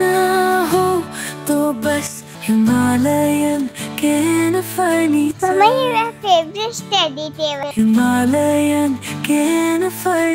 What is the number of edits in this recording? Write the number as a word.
one